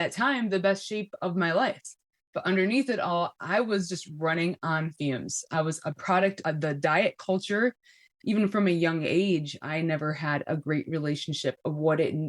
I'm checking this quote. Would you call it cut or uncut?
cut